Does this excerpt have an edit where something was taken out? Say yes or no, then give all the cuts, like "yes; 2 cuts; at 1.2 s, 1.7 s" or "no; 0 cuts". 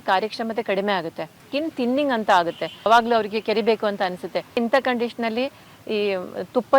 yes; 3 cuts; at 1.4 s, 2.9 s, 4.6 s